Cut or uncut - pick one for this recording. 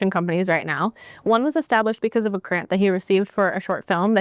uncut